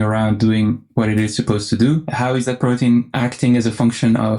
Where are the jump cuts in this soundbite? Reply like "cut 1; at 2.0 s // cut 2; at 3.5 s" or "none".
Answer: cut 1; at 2.1 s // cut 2; at 3.1 s